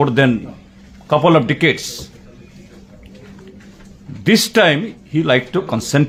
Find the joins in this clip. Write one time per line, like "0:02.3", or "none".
none